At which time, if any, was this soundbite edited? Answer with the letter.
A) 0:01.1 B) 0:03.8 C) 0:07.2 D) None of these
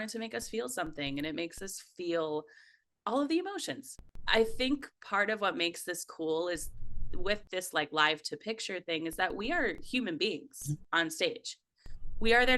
B